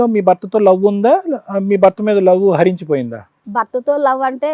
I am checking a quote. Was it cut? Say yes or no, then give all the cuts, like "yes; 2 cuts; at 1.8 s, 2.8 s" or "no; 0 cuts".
no; 0 cuts